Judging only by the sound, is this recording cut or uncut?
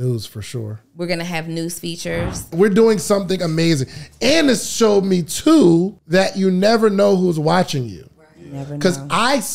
cut